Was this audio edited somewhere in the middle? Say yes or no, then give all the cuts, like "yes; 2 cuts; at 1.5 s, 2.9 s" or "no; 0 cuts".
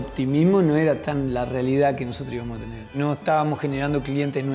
yes; 2 cuts; at 1.0 s, 3.0 s